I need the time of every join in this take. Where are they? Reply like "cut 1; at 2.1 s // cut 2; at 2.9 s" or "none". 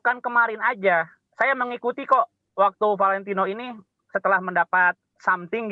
none

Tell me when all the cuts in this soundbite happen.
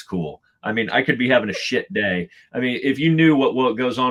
none

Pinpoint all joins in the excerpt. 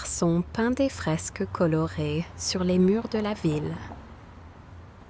cut 1; at 3.8 s

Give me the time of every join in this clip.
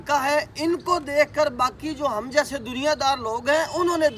none

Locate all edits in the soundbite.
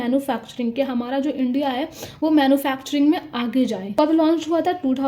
cut 1; at 3.8 s

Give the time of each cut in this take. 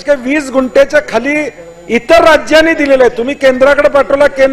none

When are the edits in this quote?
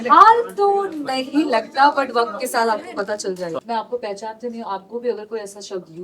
cut 1; at 3.6 s

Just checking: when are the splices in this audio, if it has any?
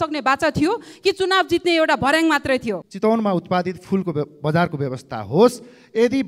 cut 1; at 2.8 s

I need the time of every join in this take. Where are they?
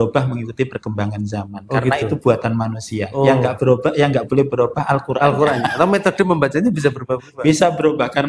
none

